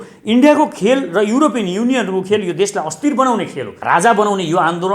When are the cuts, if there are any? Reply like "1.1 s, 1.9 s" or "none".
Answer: 3.7 s

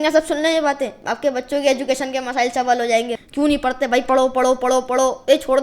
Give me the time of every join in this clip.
3.2 s

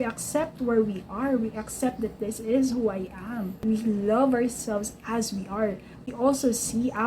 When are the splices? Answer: 3.6 s, 6.1 s

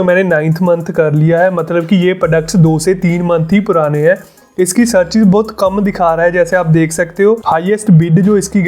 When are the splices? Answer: 4.4 s, 7.4 s

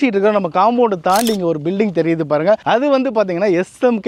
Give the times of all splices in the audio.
none

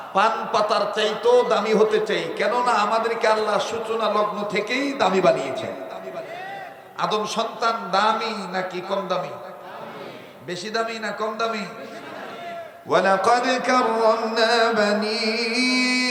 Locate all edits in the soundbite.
none

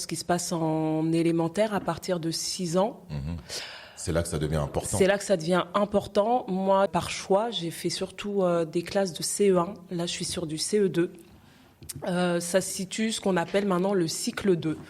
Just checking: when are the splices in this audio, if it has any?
6.9 s

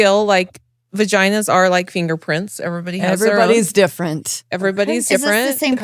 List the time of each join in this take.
none

